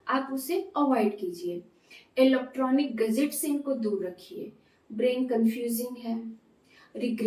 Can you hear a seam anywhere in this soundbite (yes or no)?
no